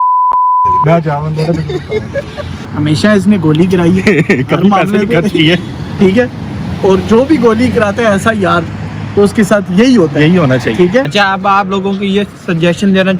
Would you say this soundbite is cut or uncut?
cut